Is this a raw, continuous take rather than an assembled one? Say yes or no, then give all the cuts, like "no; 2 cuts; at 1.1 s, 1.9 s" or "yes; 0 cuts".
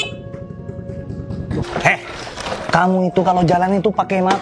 no; 1 cut; at 1.7 s